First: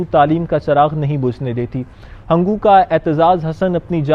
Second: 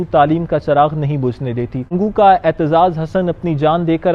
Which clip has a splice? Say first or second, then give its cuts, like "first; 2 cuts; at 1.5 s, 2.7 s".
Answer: second; 1 cut; at 1.9 s